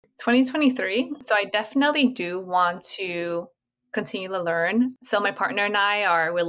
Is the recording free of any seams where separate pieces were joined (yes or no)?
no